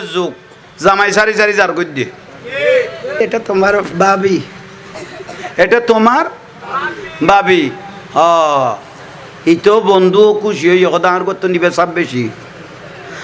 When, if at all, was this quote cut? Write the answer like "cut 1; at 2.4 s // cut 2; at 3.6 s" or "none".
cut 1; at 3.2 s